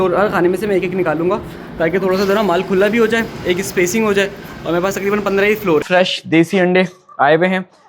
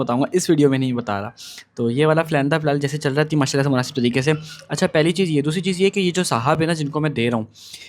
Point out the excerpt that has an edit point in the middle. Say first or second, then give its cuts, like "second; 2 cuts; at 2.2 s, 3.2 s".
first; 1 cut; at 5.9 s